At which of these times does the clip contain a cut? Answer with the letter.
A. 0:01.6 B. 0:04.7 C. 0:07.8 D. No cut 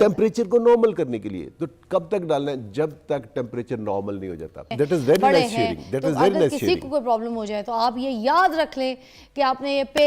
B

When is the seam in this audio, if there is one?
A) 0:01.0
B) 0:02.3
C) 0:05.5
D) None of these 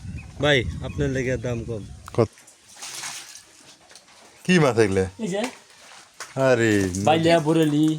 B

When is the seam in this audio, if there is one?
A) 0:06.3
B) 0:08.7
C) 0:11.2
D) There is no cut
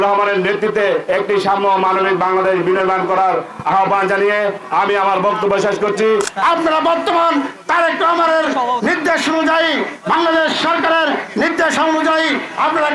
A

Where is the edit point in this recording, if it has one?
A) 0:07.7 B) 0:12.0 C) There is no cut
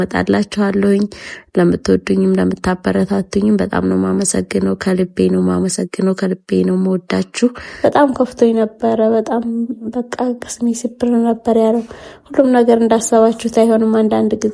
A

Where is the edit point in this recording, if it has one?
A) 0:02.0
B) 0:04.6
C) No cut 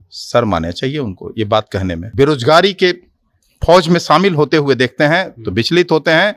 A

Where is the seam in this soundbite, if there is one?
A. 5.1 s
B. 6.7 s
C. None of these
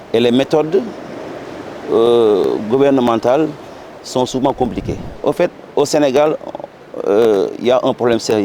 A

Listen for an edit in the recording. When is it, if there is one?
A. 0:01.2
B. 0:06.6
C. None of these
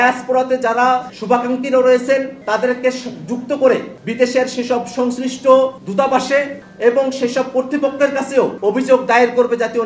B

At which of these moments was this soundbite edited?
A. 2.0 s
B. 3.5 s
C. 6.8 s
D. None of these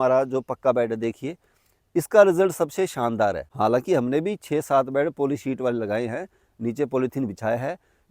B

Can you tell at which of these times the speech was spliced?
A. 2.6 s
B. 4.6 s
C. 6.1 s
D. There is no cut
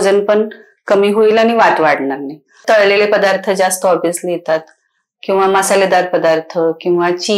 A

